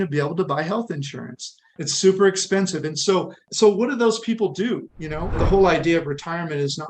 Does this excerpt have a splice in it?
yes; 3 cuts; at 1.8 s, 3.4 s, 5.4 s

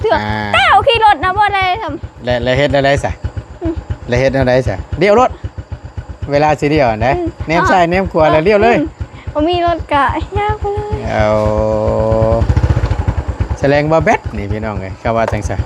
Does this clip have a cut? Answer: no; 0 cuts

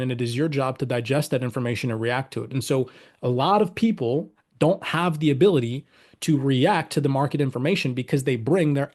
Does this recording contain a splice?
no; 0 cuts

